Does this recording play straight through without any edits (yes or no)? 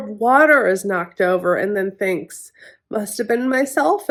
yes